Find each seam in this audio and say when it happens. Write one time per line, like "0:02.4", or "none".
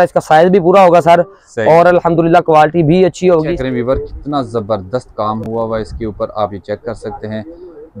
0:03.5